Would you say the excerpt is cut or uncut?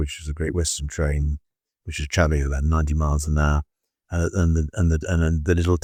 uncut